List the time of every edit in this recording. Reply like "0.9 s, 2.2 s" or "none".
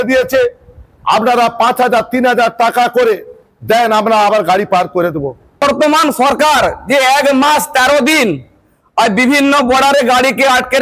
5.6 s